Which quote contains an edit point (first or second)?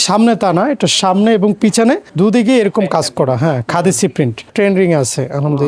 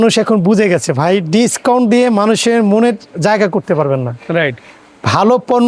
first